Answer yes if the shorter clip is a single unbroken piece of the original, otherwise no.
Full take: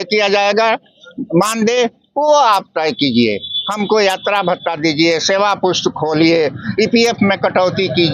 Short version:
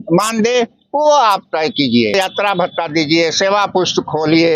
no